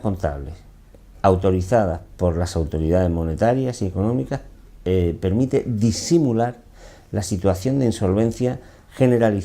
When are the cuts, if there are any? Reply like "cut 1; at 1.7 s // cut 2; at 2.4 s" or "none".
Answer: cut 1; at 3.0 s